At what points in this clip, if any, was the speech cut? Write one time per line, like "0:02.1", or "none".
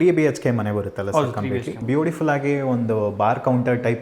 0:01.8